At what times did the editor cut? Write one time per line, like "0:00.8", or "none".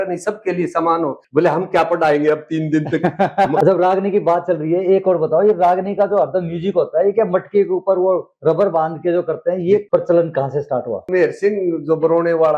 0:01.2
0:03.6
0:09.8
0:11.1